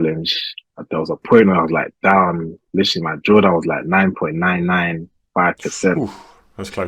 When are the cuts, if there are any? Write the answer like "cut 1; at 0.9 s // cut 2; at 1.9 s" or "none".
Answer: none